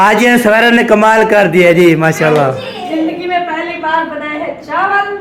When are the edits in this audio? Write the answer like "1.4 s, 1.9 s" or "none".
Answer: none